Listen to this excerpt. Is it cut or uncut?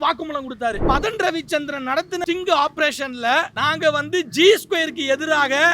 cut